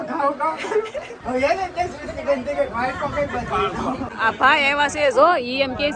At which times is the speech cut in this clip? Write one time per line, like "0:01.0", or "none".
0:04.1